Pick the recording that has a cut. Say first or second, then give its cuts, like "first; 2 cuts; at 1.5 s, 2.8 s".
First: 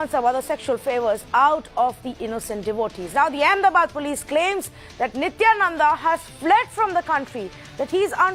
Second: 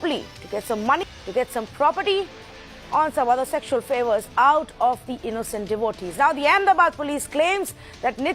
second; 1 cut; at 1.0 s